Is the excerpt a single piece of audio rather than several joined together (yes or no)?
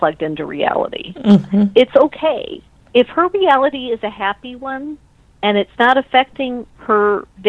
yes